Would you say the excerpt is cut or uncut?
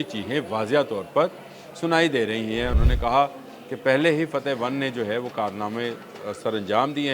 cut